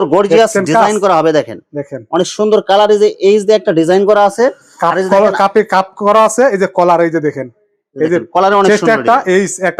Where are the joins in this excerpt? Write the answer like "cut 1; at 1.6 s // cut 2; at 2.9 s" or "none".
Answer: none